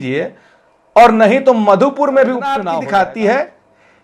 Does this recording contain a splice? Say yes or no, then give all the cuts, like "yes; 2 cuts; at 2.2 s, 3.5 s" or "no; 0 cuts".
yes; 1 cut; at 2.6 s